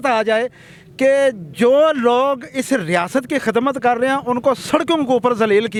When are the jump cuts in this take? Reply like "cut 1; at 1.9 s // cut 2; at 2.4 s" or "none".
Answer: none